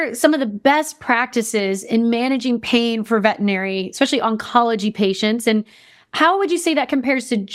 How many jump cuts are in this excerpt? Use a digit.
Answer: 0